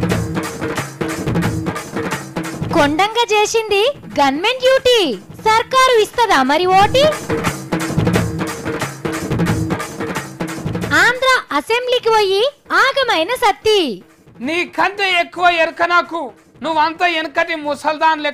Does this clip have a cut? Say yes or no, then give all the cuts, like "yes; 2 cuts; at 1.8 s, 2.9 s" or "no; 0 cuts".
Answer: no; 0 cuts